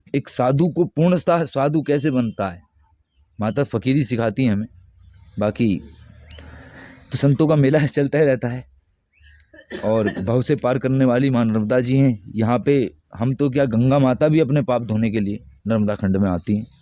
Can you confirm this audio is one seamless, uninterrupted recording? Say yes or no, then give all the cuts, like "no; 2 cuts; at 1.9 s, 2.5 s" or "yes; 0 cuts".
yes; 0 cuts